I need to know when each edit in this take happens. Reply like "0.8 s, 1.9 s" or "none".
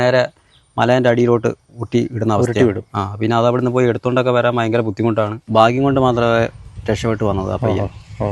5.4 s